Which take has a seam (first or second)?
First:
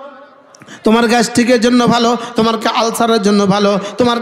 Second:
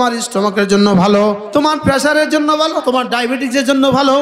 second